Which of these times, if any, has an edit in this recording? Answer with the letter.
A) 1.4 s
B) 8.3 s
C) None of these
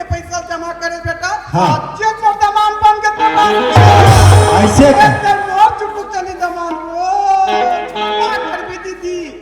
B